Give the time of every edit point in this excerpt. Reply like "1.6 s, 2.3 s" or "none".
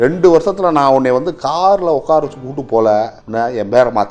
3.2 s